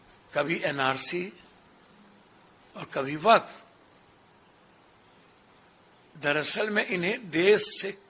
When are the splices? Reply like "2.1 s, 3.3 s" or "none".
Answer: none